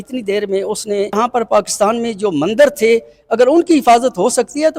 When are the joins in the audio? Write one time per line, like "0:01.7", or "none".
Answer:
0:01.1